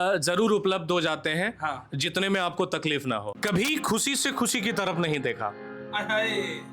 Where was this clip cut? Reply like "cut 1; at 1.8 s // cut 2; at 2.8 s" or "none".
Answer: cut 1; at 3.3 s